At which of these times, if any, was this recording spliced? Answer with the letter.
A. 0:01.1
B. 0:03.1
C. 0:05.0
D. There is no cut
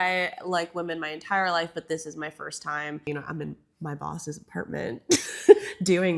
B